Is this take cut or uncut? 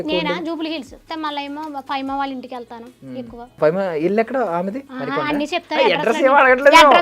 cut